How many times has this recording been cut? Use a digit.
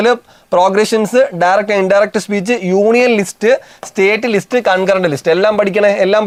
0